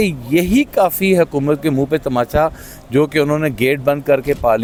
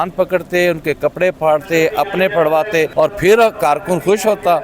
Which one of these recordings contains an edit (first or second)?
second